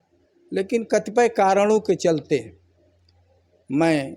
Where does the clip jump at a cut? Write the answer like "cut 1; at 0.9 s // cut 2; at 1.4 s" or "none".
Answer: none